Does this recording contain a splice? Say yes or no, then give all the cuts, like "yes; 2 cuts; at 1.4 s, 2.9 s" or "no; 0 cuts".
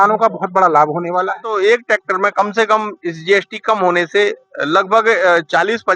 yes; 1 cut; at 1.5 s